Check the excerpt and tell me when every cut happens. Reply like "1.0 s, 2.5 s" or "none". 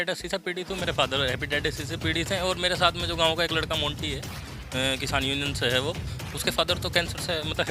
none